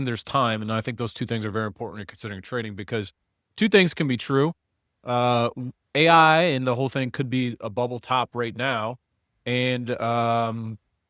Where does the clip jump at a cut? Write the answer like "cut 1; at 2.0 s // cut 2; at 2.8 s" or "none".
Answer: none